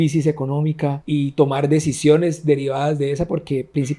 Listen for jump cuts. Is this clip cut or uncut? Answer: cut